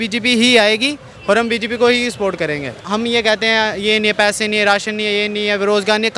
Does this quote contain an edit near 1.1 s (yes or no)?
no